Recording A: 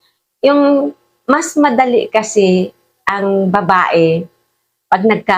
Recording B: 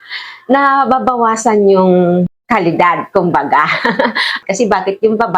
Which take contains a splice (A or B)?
B